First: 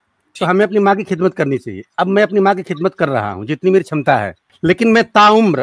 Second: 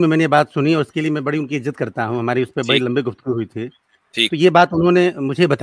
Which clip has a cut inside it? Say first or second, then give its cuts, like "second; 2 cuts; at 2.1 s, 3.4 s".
first; 1 cut; at 4.4 s